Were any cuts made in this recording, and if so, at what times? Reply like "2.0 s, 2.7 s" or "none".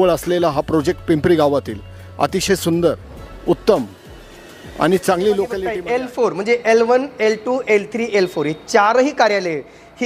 5.7 s